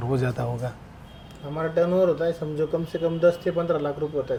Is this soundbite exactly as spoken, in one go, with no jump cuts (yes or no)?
yes